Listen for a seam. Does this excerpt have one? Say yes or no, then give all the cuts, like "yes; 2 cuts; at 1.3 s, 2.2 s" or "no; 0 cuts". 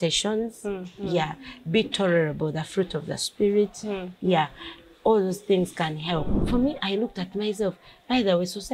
yes; 1 cut; at 6.4 s